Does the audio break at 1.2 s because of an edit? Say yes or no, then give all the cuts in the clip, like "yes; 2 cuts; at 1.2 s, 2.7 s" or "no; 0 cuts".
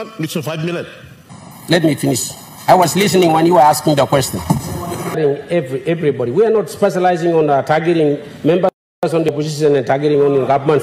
yes; 2 cuts; at 1.2 s, 5.2 s